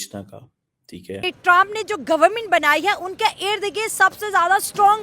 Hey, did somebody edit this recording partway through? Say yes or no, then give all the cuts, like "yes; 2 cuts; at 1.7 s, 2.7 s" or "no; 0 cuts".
yes; 1 cut; at 1.1 s